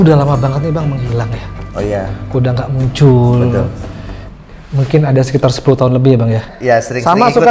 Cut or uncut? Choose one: cut